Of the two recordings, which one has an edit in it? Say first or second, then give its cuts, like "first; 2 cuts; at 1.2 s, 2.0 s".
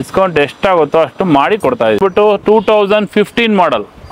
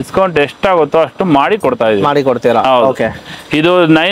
first; 1 cut; at 2.0 s